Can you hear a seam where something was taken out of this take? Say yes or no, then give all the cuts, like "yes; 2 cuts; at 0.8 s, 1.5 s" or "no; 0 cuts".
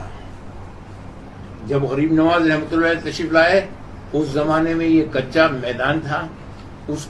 no; 0 cuts